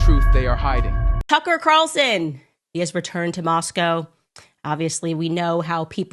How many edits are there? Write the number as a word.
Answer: one